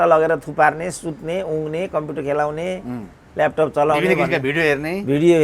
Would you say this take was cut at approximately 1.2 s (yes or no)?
no